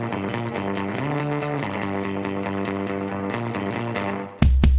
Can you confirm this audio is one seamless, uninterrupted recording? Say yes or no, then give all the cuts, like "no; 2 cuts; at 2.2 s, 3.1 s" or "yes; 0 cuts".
yes; 0 cuts